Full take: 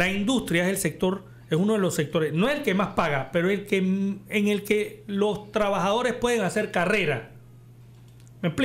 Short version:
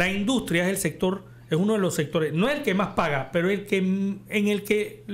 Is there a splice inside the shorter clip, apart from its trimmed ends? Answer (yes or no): no